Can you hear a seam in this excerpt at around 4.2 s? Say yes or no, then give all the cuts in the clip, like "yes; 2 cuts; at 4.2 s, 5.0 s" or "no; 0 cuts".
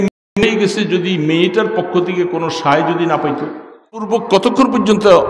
yes; 1 cut; at 4.2 s